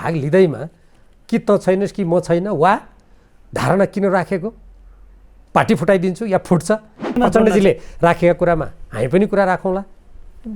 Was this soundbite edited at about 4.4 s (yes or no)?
no